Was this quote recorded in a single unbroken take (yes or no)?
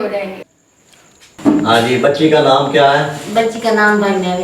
no